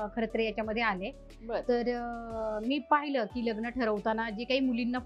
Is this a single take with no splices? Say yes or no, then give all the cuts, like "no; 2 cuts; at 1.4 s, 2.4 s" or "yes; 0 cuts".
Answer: yes; 0 cuts